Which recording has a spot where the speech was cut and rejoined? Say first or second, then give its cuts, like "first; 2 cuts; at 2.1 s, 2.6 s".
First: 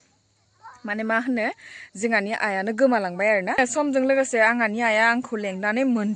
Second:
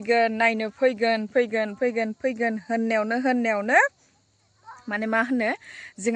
first; 1 cut; at 3.6 s